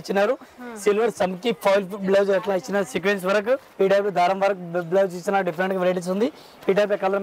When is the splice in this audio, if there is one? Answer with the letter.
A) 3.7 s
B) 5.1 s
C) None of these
A